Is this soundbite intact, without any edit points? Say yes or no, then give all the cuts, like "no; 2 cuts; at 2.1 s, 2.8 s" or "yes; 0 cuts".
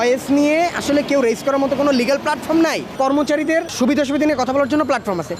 no; 2 cuts; at 3.0 s, 3.7 s